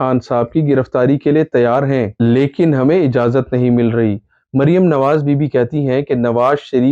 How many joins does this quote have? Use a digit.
0